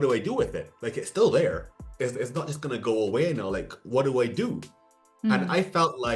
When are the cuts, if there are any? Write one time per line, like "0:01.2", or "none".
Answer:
none